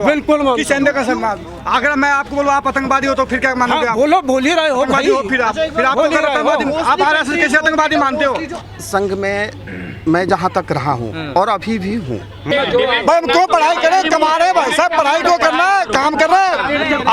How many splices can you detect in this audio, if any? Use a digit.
2